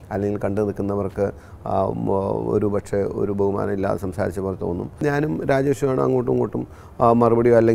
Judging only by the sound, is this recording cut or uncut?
cut